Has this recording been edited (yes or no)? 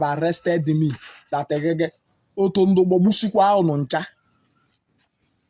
no